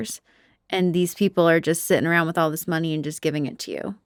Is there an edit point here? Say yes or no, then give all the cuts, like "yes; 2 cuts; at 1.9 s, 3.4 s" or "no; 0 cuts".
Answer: no; 0 cuts